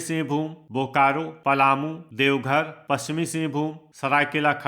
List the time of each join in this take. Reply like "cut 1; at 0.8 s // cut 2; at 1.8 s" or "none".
cut 1; at 1.3 s // cut 2; at 2.0 s // cut 3; at 3.8 s